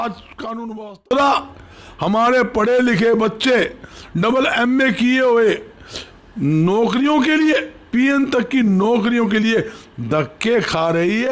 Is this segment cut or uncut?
cut